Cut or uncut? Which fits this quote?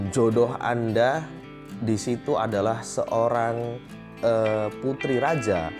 uncut